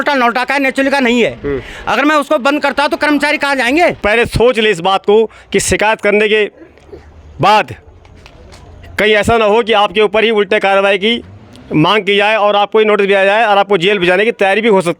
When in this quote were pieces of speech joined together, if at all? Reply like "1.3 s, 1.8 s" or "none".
4.0 s